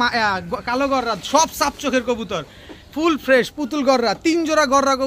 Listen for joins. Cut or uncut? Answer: uncut